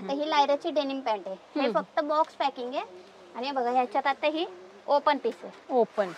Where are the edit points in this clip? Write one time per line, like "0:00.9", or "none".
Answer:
none